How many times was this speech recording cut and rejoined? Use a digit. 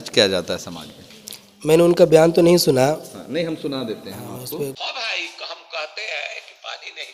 1